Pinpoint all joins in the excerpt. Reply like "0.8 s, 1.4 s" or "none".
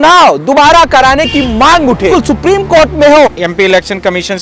2.1 s, 3.3 s